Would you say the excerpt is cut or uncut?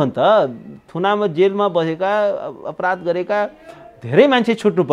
uncut